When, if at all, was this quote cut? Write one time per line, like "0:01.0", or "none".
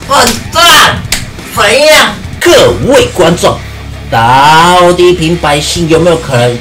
0:02.2